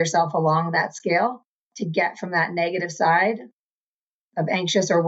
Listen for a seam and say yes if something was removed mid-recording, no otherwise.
no